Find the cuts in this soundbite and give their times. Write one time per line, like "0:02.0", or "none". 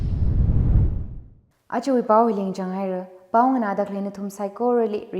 none